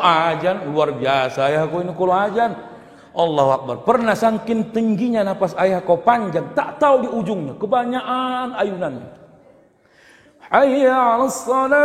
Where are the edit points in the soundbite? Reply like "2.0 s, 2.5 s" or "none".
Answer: none